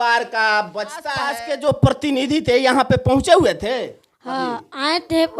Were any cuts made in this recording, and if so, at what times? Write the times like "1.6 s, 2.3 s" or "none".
1.2 s